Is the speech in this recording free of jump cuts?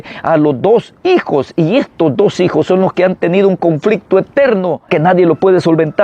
no; 1 cut; at 4.8 s

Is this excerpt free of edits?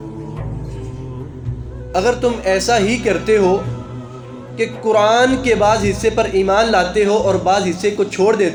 yes; 0 cuts

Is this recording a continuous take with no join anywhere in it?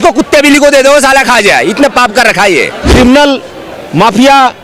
no; 1 cut; at 2.9 s

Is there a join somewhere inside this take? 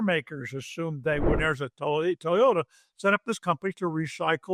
yes; 1 cut; at 1.4 s

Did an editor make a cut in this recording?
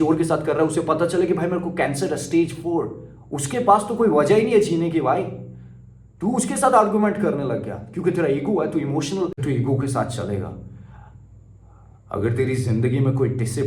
yes; 1 cut; at 9.4 s

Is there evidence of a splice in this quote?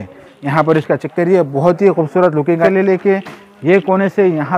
yes; 1 cut; at 2.7 s

